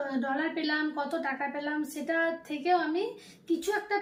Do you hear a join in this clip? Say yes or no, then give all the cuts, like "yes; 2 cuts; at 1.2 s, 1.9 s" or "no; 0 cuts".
no; 0 cuts